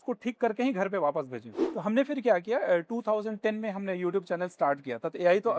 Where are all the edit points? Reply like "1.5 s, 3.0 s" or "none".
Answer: 1.5 s

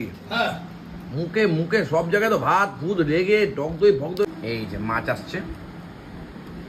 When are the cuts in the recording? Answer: 4.2 s

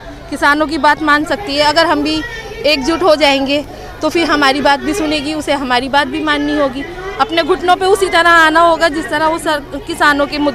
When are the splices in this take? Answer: none

